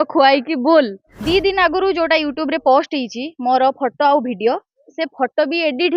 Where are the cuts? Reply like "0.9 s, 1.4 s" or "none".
1.1 s

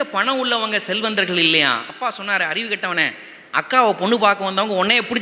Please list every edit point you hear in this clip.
1.9 s

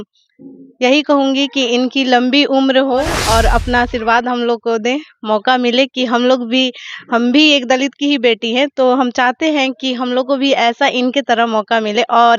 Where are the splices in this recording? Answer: 3.2 s

